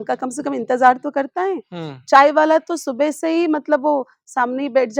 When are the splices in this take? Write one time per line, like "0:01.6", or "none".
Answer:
none